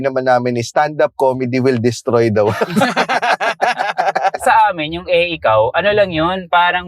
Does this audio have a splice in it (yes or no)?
yes